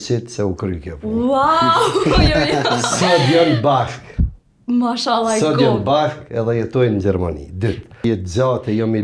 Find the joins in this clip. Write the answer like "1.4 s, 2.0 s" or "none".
8.0 s